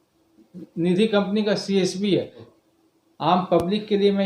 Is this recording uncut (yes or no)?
no